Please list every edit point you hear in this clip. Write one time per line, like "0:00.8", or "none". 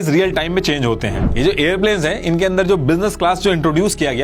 0:01.2